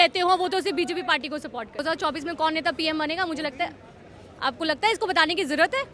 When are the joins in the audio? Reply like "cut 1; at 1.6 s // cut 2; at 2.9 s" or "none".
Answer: cut 1; at 1.8 s